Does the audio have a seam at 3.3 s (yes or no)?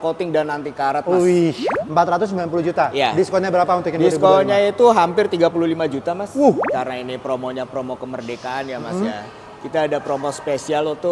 no